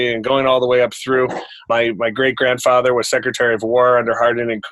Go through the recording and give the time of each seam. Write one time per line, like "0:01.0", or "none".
0:01.6